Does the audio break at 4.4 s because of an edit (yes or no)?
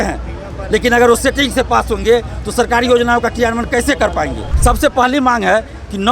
yes